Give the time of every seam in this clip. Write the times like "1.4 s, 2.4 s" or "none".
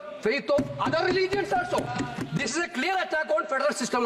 2.2 s